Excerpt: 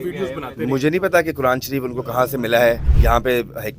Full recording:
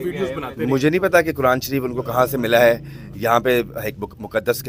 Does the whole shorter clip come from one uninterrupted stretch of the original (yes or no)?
no